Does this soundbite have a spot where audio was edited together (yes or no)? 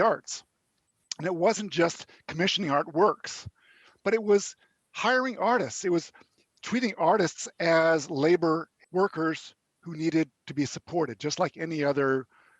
yes